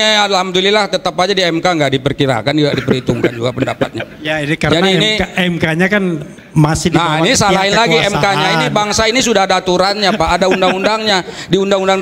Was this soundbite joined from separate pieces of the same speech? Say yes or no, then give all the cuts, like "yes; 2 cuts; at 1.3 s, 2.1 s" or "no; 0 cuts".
no; 0 cuts